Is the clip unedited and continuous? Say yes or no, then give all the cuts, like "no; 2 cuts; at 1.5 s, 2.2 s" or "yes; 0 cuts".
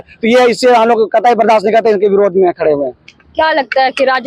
yes; 0 cuts